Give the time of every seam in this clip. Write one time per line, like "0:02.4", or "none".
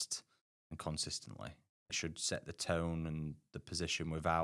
0:01.9